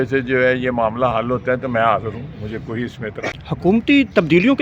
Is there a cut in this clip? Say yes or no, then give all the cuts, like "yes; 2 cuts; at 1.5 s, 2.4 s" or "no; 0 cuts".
yes; 1 cut; at 3.4 s